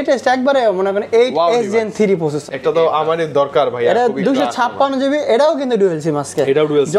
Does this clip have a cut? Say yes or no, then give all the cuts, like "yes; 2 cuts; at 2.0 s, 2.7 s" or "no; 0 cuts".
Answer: yes; 1 cut; at 2.4 s